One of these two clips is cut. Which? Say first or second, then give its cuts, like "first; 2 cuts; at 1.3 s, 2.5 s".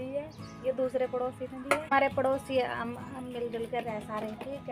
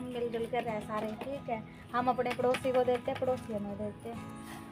first; 1 cut; at 1.9 s